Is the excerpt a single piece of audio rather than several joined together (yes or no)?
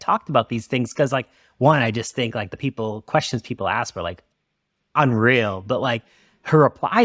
yes